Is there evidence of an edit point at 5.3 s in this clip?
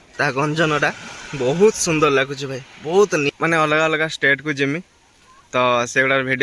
no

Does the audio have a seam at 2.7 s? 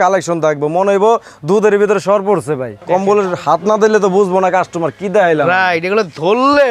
yes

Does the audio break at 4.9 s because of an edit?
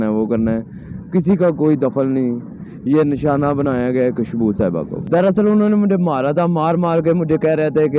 yes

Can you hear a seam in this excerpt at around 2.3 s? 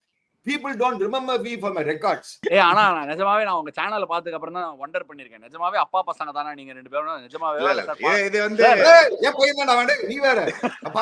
yes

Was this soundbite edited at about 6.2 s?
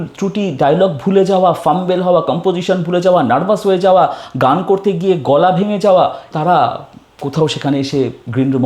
yes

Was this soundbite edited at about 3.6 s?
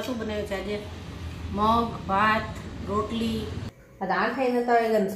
yes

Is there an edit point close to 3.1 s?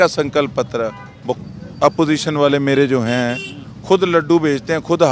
no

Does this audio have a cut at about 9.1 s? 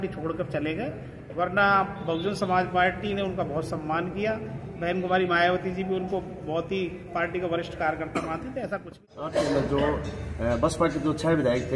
yes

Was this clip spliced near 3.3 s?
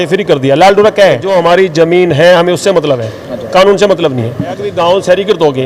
no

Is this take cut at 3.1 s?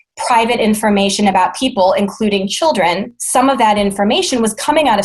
yes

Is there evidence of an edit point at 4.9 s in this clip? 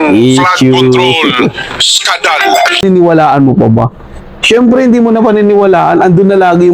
no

